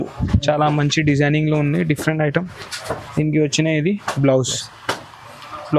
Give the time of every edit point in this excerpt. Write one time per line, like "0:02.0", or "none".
none